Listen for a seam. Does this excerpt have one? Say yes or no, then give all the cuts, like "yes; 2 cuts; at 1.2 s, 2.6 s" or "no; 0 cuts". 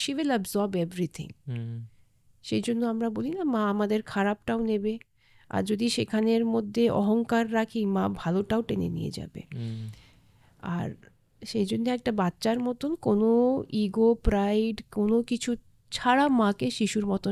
no; 0 cuts